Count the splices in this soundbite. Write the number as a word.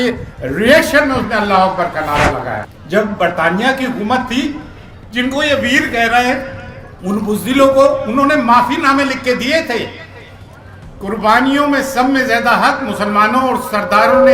one